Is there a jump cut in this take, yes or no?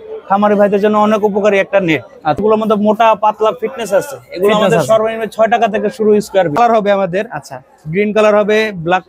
yes